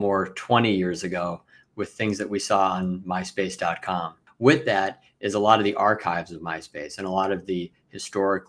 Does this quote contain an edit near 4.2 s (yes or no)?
yes